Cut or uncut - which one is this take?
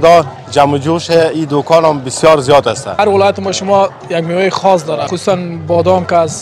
cut